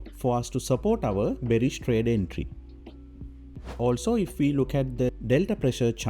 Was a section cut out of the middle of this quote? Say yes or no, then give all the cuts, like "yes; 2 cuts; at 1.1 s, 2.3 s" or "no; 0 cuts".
no; 0 cuts